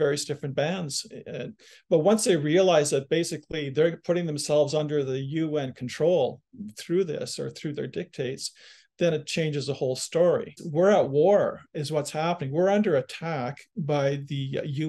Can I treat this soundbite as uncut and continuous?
no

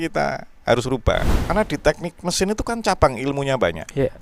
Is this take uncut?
no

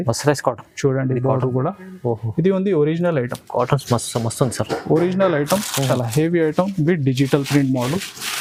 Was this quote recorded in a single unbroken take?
yes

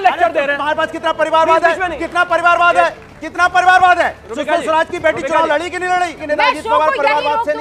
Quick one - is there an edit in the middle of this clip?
no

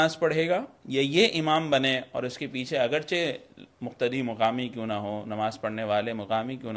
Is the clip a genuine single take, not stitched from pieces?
yes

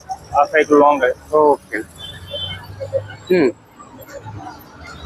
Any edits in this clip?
no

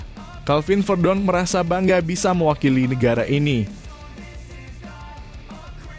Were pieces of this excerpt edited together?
yes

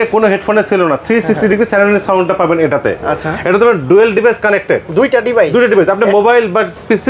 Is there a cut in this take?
no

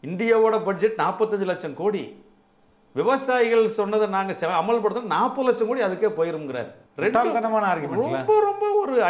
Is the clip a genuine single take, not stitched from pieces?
yes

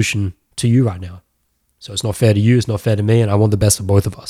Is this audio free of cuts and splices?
yes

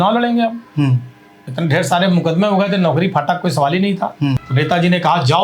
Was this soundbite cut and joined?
yes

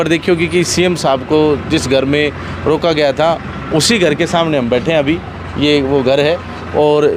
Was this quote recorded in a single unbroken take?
yes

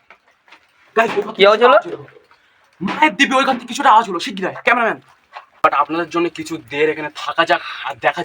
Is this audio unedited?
no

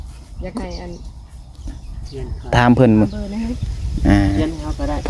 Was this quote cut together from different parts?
yes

